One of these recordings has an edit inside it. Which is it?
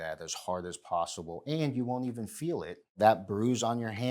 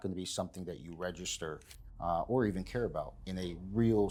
first; 1 cut; at 3.0 s

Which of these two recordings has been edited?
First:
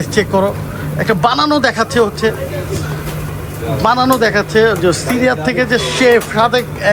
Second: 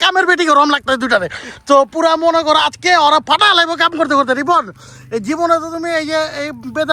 second; 1 cut; at 1.4 s

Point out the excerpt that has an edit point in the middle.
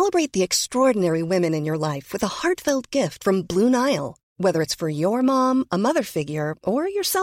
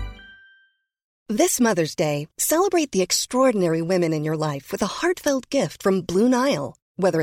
second; 1 cut; at 1.1 s

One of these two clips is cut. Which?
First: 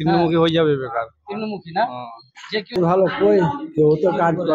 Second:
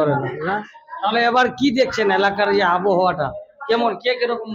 first; 1 cut; at 2.8 s

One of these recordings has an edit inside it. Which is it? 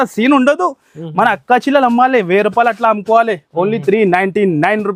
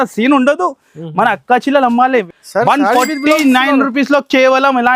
second; 1 cut; at 2.3 s

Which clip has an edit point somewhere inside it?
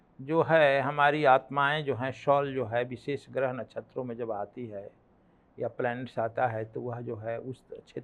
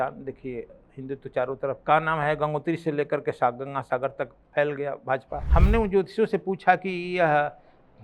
second; 3 cuts; at 1.8 s, 4.4 s, 5.4 s

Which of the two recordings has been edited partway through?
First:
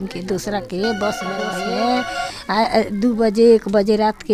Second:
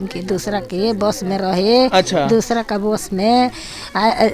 first; 1 cut; at 1.5 s

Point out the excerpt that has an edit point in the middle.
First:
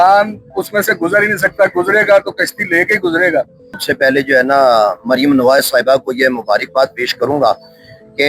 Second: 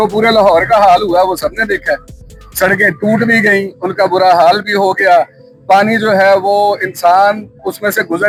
first; 1 cut; at 3.8 s

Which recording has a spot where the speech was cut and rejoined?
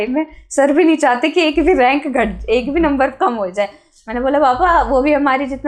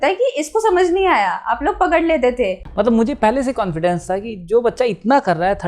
second; 1 cut; at 2.6 s

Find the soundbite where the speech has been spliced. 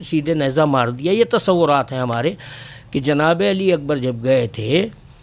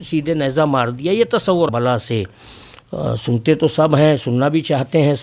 second; 1 cut; at 1.7 s

